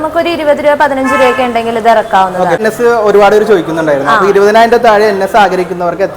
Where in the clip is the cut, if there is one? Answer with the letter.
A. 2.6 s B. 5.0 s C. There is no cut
A